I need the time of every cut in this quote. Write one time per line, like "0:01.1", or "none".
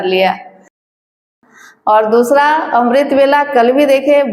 0:01.1